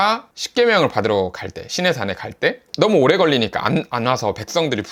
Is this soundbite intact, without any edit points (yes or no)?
yes